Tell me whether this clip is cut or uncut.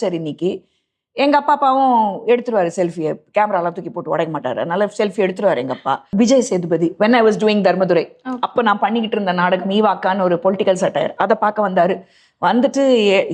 cut